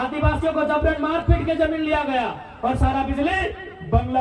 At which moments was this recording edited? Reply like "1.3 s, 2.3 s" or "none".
none